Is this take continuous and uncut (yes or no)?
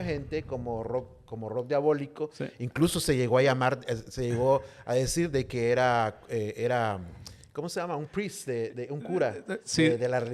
yes